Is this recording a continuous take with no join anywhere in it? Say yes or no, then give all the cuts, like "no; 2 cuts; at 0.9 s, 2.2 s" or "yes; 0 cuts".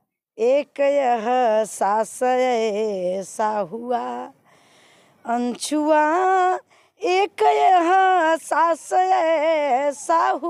yes; 0 cuts